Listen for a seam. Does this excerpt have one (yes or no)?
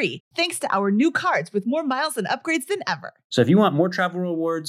no